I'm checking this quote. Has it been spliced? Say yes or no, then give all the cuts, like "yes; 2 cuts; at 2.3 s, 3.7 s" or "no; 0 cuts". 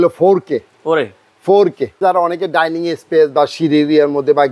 yes; 1 cut; at 2.0 s